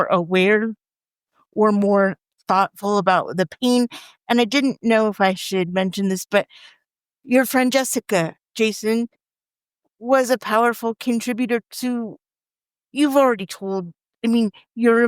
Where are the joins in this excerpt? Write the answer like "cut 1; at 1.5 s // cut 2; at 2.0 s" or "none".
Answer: cut 1; at 2.2 s // cut 2; at 7.1 s